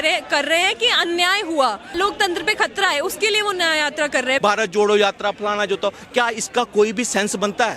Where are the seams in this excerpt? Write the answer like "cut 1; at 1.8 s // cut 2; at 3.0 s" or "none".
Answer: cut 1; at 1.8 s // cut 2; at 4.4 s